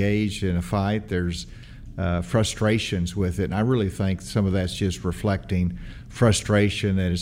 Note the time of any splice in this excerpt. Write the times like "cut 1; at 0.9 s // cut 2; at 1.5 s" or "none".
none

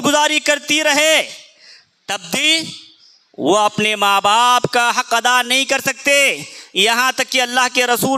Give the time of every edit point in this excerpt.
none

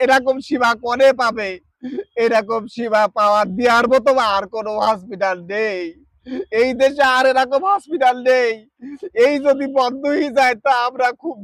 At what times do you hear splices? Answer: none

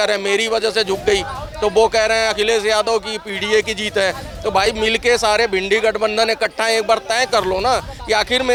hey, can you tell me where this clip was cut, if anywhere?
none

